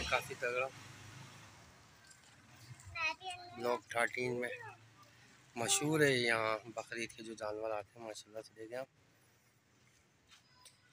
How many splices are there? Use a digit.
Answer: 0